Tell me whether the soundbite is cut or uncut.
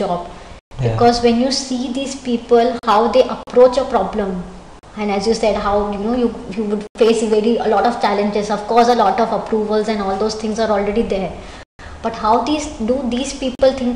uncut